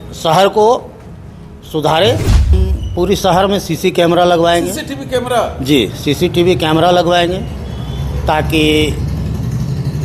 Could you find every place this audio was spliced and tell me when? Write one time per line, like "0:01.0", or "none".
0:02.7